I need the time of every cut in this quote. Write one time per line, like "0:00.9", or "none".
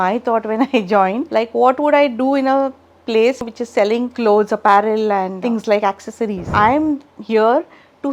0:01.2
0:03.9
0:05.3
0:06.4